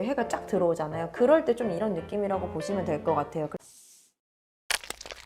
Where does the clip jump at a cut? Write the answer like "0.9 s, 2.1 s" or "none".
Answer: 3.5 s